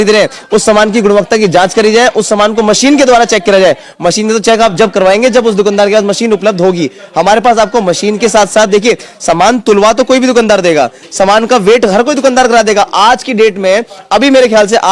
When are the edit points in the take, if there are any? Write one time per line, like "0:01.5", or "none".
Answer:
none